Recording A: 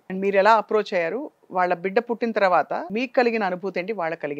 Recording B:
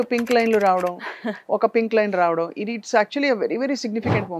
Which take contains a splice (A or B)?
A